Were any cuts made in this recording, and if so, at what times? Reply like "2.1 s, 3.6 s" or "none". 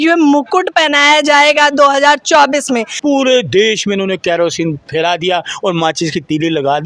2.9 s